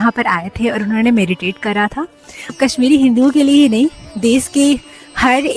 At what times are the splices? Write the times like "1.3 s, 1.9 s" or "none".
2.5 s

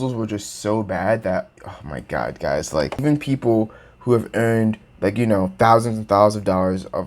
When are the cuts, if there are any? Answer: 3.0 s

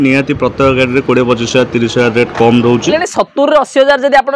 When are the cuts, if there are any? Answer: 2.9 s

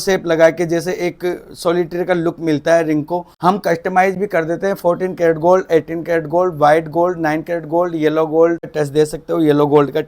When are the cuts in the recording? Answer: 3.3 s, 8.7 s

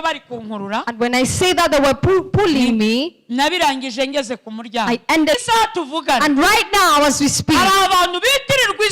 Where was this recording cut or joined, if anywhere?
5.4 s

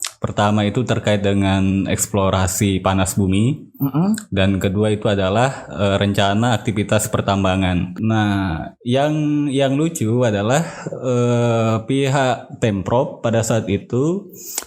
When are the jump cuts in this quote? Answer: 7.9 s

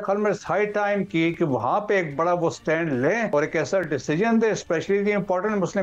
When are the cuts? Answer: 3.3 s

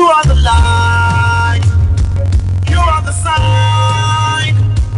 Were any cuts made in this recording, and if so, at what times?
none

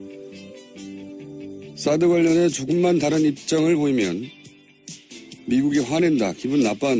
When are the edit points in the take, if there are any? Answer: none

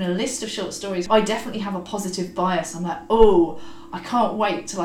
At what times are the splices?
1.1 s

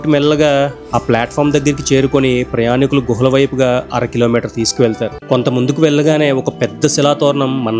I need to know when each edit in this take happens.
5.1 s

